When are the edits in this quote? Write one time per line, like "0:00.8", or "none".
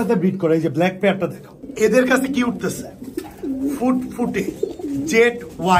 0:01.6